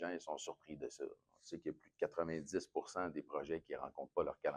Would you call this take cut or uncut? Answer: uncut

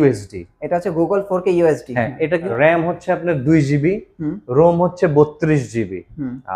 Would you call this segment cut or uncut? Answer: cut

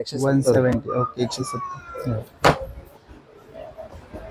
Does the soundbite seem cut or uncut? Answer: uncut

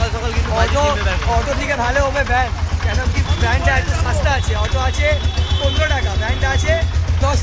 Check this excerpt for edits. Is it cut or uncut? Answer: uncut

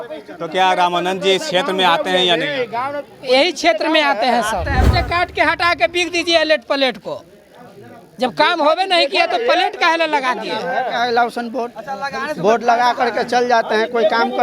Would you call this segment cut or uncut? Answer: cut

